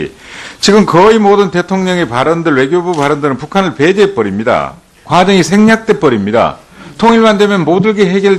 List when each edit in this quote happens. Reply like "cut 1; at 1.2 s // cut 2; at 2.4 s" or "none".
cut 1; at 1.2 s